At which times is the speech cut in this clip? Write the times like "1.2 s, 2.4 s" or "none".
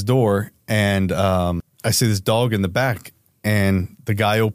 1.7 s